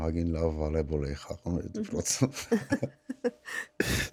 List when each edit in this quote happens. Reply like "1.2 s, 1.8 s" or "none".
none

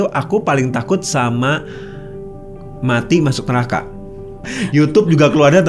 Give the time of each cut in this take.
4.5 s

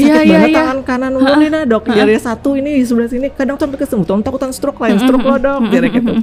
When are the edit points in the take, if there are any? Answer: none

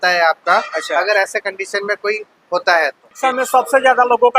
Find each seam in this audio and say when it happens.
3.1 s

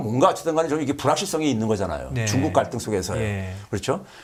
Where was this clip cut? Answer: none

